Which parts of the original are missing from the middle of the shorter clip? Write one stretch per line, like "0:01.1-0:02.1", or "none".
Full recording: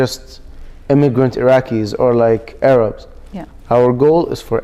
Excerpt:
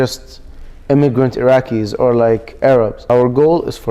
0:03.0-0:03.6